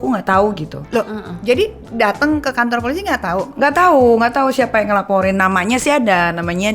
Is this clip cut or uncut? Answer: uncut